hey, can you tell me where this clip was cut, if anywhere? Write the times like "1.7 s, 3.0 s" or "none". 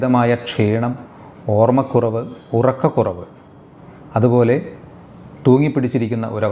none